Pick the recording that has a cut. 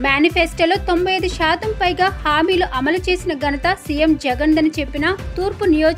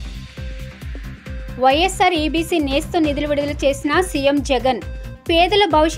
second; 1 cut; at 1.5 s

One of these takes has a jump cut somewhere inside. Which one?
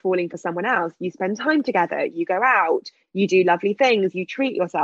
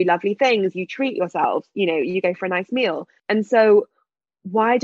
second; 1 cut; at 3.1 s

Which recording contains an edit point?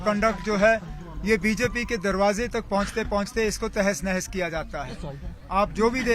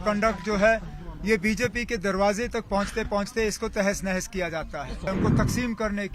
second; 1 cut; at 5.1 s

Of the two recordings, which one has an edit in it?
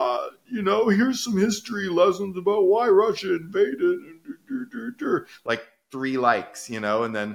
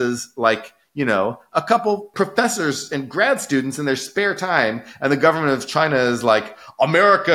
second; 1 cut; at 2.1 s

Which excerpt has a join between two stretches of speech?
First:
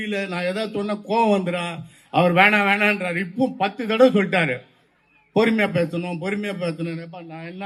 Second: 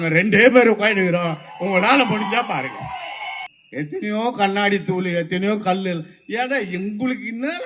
second; 1 cut; at 3.4 s

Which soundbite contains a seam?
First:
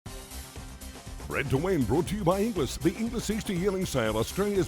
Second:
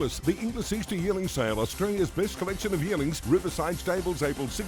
first; 1 cut; at 1.3 s

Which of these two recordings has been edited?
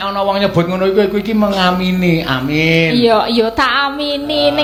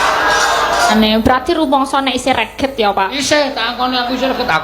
second; 1 cut; at 0.9 s

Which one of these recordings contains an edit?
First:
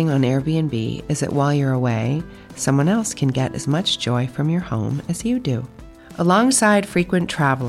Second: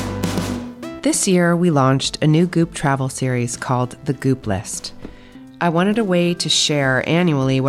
second; 1 cut; at 0.9 s

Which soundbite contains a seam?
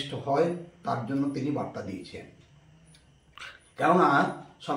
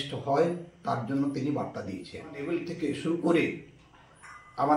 second; 1 cut; at 2.5 s

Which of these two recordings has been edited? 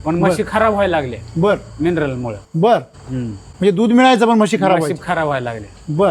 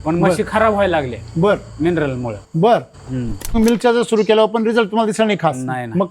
second; 1 cut; at 3.5 s

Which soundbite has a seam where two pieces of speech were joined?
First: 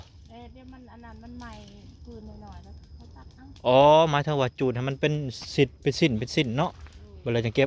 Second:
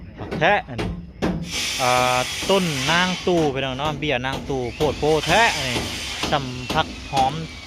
second; 1 cut; at 1.5 s

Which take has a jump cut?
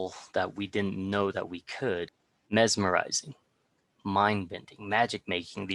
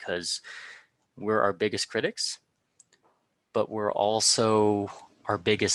first; 1 cut; at 2.1 s

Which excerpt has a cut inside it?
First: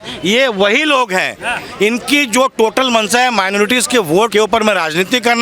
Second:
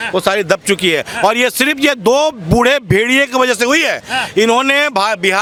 first; 1 cut; at 4.3 s

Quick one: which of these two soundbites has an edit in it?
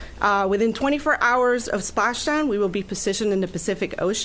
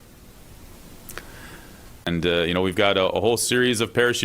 second; 1 cut; at 2.1 s

